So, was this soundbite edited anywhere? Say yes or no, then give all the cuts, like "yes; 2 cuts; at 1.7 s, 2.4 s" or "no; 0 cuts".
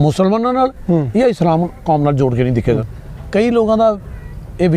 yes; 1 cut; at 2.8 s